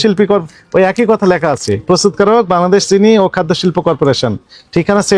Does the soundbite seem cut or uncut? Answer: uncut